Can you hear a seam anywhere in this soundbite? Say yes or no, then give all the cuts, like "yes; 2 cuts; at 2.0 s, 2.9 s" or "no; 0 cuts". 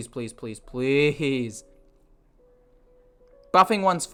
no; 0 cuts